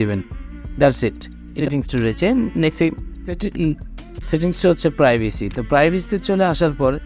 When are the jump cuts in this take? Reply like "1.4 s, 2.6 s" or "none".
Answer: 1.6 s, 3.4 s